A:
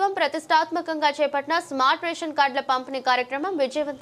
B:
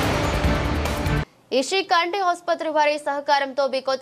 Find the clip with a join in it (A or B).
B